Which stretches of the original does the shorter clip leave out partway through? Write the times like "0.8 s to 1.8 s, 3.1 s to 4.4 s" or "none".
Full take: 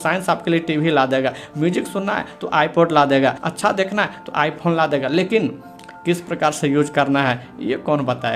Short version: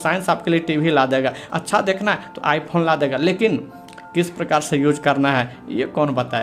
1.5 s to 3.4 s